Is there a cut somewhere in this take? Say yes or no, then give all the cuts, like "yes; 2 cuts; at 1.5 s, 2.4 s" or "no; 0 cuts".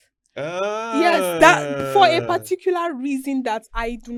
no; 0 cuts